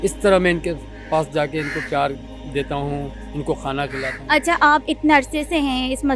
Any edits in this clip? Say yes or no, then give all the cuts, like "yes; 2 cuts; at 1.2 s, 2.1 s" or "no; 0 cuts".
no; 0 cuts